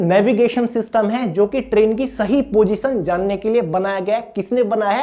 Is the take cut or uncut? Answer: uncut